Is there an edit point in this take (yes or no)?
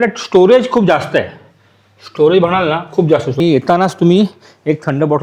yes